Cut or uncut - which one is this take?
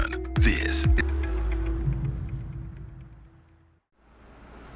cut